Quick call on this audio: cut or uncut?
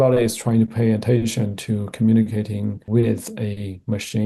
cut